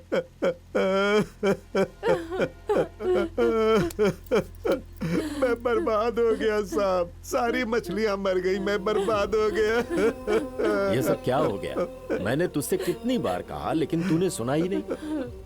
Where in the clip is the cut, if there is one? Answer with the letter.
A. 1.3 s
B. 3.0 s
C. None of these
B